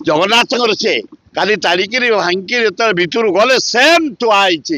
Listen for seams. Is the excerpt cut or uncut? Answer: cut